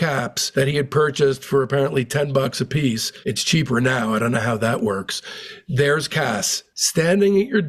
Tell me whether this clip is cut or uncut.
cut